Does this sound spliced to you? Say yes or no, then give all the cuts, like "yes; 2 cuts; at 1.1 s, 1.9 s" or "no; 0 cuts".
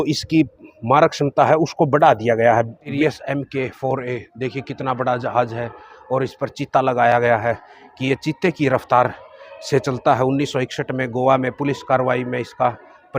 yes; 1 cut; at 2.8 s